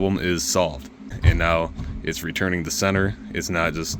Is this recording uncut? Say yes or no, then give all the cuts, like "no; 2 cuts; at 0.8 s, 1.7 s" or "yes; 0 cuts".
no; 1 cut; at 1.1 s